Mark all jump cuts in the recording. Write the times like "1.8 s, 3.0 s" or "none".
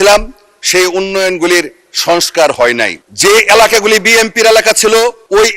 3.0 s